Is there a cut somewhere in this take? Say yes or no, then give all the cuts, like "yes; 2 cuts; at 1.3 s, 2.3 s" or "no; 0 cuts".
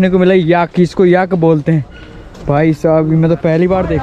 no; 0 cuts